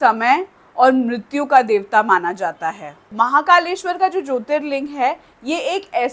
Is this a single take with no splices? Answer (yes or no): no